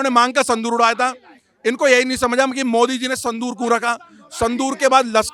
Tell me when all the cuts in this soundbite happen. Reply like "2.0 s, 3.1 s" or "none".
none